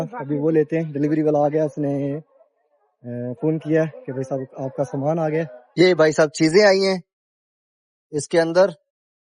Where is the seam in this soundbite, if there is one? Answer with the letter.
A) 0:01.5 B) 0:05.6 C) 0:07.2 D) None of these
B